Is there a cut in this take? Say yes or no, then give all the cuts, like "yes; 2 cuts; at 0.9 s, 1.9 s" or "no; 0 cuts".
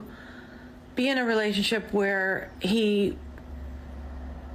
no; 0 cuts